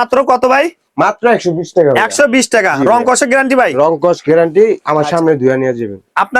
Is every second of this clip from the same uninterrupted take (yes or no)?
yes